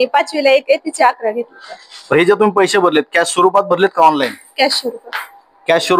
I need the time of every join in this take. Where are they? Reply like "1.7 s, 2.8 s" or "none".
1.9 s